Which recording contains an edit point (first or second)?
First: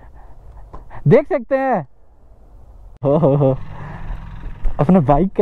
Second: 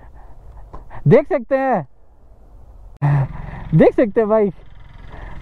first